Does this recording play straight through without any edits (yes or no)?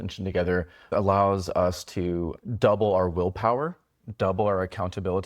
no